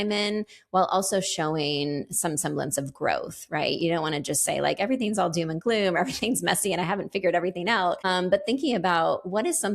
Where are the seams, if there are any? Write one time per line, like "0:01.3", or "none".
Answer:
0:08.0